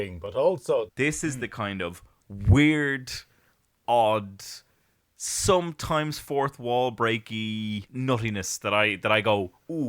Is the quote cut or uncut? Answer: cut